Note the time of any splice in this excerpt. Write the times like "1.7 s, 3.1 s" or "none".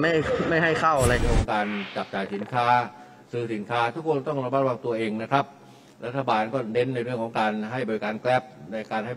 1.2 s